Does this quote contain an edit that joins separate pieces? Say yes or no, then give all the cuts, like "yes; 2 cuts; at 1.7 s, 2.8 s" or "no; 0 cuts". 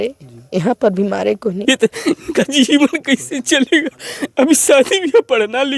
yes; 1 cut; at 1.6 s